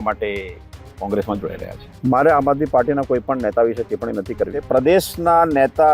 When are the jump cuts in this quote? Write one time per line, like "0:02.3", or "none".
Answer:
0:01.8
0:04.6